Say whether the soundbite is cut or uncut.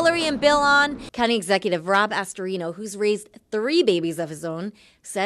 cut